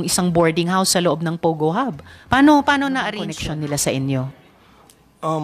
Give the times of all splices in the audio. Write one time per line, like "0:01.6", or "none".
0:03.4